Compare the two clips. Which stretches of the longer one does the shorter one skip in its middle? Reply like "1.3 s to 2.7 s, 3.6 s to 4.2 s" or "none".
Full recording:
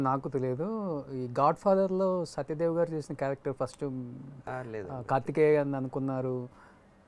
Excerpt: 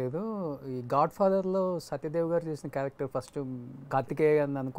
4.3 s to 5.0 s